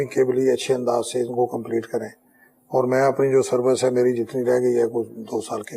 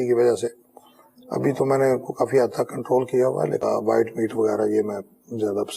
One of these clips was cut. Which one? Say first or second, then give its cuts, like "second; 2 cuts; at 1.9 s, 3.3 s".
second; 1 cut; at 3.6 s